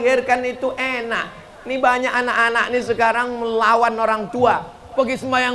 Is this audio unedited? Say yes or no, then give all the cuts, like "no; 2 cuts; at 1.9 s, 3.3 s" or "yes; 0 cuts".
yes; 0 cuts